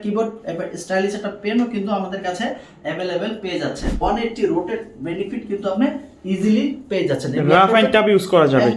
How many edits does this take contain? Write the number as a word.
one